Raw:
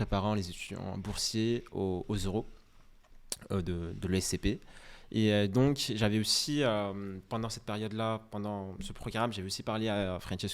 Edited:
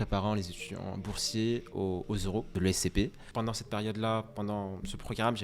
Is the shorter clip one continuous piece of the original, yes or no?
no